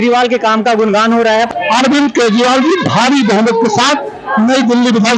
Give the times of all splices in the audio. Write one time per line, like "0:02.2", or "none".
0:01.5